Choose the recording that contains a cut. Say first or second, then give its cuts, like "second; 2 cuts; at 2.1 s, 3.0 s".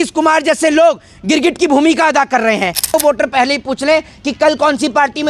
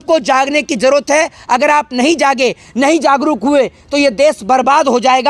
first; 1 cut; at 2.9 s